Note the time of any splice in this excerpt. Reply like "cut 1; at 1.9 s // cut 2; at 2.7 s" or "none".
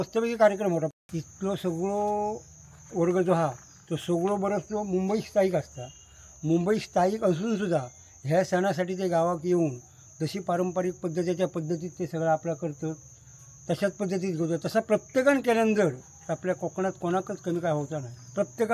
cut 1; at 1.1 s